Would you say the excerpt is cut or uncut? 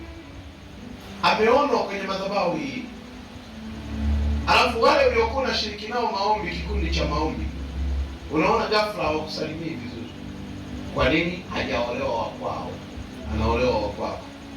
cut